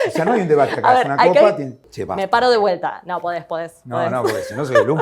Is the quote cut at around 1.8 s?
yes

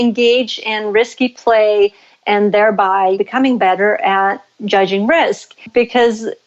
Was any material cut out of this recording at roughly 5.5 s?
yes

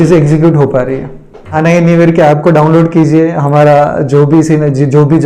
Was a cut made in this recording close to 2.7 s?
no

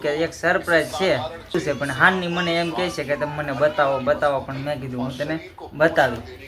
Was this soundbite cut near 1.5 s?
yes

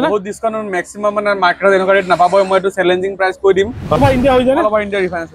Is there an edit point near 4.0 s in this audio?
yes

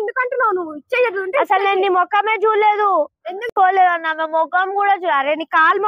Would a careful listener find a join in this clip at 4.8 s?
no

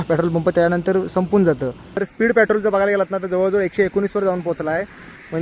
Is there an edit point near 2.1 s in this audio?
yes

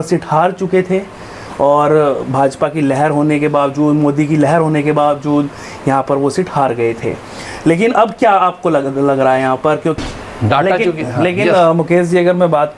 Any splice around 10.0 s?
yes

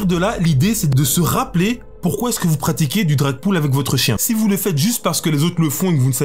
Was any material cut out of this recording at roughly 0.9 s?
yes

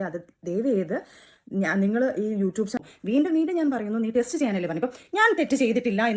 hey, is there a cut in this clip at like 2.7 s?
yes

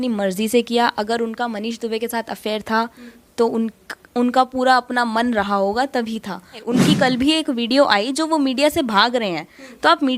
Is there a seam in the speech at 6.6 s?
yes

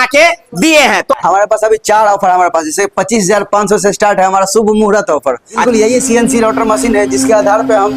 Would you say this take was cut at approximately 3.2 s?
no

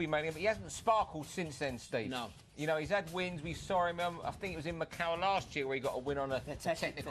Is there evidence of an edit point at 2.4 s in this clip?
no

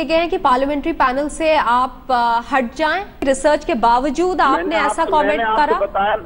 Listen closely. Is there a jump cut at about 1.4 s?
no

